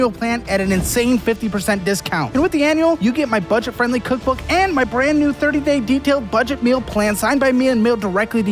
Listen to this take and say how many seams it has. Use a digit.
0